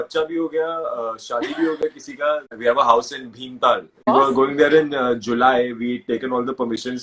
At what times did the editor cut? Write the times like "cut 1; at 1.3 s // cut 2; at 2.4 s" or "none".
cut 1; at 2.5 s // cut 2; at 4.0 s